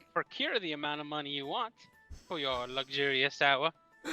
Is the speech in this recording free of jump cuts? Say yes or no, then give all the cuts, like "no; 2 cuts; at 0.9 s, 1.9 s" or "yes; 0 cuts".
yes; 0 cuts